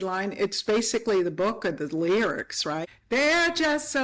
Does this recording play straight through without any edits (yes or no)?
no